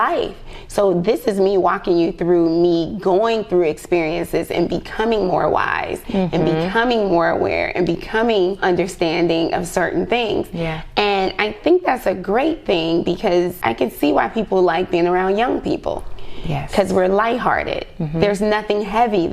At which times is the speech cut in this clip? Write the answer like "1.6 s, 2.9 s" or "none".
8.6 s, 13.6 s